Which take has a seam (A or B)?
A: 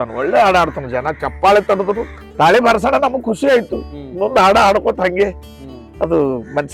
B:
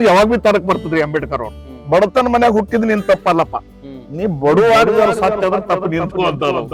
A